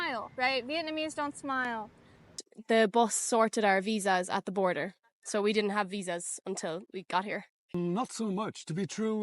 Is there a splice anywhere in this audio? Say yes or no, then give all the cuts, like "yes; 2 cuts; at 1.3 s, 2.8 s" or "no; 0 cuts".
yes; 2 cuts; at 2.3 s, 7.7 s